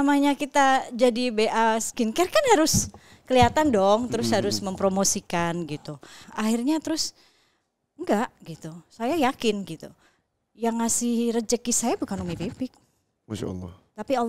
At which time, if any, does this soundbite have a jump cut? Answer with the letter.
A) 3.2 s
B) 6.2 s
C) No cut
B